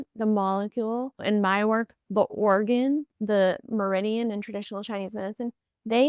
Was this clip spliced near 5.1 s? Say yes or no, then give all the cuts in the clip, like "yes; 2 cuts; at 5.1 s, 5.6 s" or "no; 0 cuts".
no; 2 cuts; at 1.2 s, 3.1 s